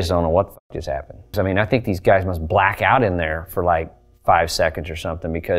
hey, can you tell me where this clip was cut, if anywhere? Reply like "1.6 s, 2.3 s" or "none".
1.3 s